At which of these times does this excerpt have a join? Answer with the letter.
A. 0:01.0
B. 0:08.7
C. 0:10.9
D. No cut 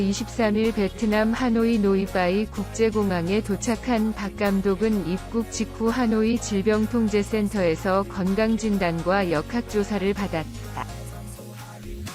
C